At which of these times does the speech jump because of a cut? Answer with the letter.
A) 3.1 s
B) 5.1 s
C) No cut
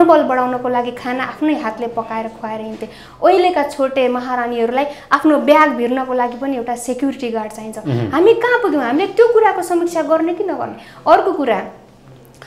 C